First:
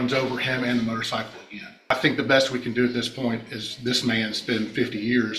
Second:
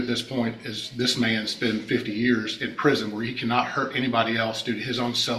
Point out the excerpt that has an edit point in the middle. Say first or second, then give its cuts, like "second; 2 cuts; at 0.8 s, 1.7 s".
first; 1 cut; at 1.9 s